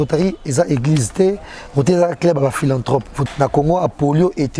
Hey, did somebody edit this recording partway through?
yes; 1 cut; at 3.2 s

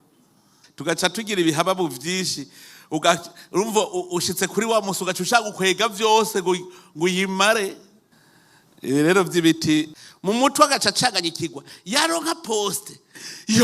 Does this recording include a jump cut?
yes; 1 cut; at 10.0 s

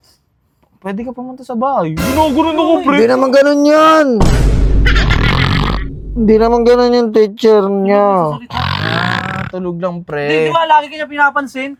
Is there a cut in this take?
no; 0 cuts

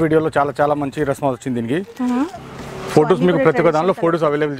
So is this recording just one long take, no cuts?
no; 1 cut; at 2.3 s

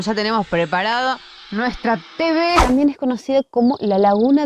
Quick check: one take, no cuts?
no; 1 cut; at 2.6 s

